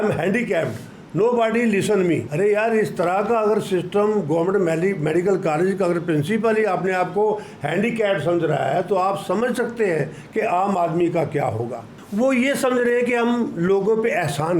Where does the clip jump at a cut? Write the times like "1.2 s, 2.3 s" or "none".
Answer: 2.3 s, 12.0 s